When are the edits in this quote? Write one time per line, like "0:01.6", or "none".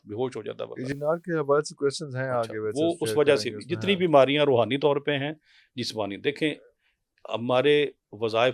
none